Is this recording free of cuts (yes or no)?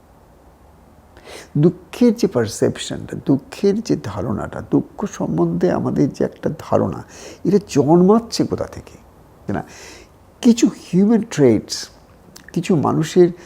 no